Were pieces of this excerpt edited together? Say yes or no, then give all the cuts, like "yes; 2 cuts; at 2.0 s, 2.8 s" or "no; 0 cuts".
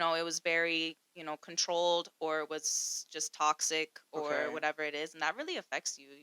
no; 0 cuts